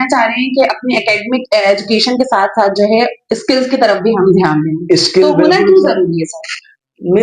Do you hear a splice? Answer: no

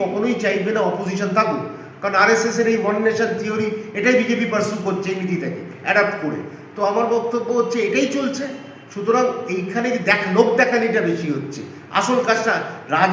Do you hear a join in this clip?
no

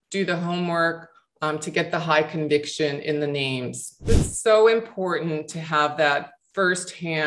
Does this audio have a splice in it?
yes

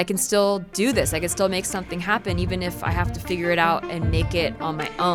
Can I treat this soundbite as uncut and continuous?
yes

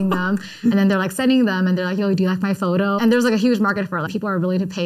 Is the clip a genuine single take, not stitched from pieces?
no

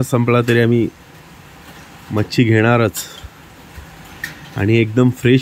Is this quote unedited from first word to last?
yes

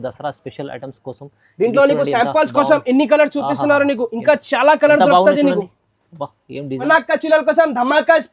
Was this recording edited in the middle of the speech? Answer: yes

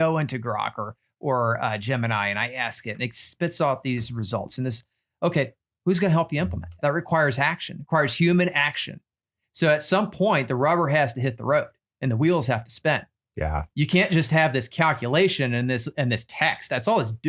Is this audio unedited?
no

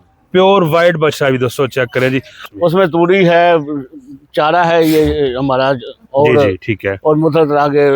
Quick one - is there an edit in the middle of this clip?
yes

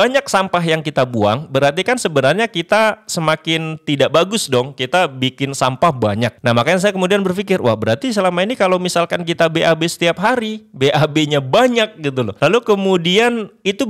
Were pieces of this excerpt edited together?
yes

